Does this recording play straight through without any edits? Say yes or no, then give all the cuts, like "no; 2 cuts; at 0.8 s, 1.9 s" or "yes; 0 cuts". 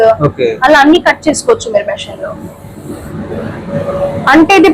yes; 0 cuts